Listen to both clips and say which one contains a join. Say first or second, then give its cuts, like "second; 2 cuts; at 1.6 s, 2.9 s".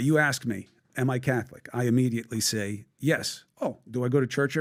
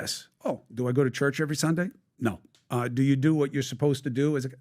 second; 1 cut; at 2.9 s